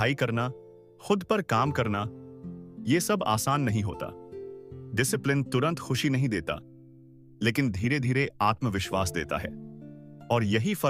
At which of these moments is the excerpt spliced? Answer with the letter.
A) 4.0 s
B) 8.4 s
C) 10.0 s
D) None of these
D